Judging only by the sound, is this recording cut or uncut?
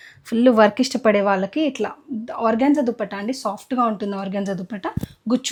uncut